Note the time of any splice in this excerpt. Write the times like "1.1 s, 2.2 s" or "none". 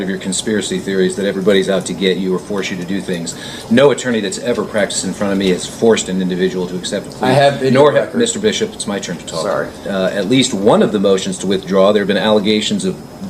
9.8 s